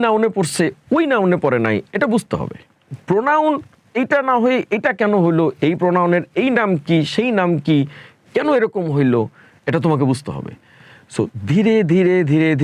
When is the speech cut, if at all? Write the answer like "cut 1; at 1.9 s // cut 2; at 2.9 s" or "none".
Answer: none

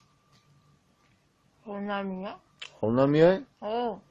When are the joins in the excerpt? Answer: cut 1; at 3.1 s

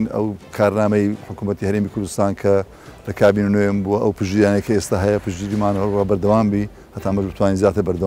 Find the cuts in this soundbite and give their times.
none

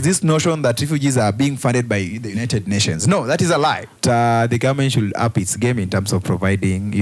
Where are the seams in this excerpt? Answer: cut 1; at 4.0 s

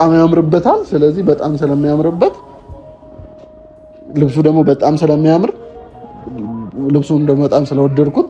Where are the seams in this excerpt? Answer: none

